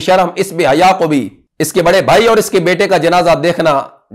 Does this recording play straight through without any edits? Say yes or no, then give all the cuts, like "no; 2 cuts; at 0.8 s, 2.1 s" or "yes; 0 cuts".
yes; 0 cuts